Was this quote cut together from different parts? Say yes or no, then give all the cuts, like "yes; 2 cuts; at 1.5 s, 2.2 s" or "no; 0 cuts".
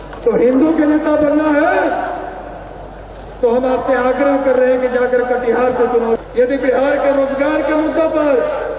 yes; 1 cut; at 6.2 s